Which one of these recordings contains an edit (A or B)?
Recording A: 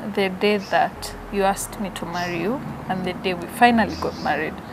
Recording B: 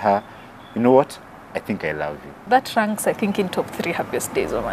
B